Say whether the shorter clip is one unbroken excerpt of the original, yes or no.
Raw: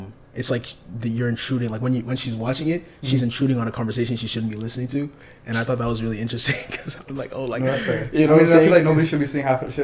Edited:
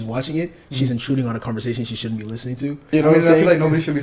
no